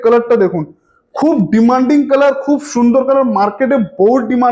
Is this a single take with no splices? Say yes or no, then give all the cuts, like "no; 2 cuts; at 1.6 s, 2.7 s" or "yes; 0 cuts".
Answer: yes; 0 cuts